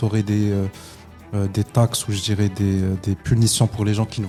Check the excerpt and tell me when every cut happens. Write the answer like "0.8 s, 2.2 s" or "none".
none